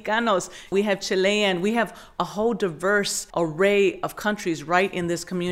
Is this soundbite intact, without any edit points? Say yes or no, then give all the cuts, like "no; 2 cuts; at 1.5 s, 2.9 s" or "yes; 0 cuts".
no; 1 cut; at 3.2 s